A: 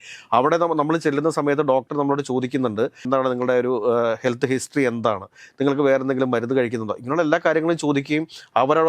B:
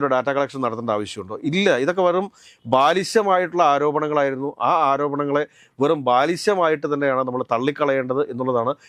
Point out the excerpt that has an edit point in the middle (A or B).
A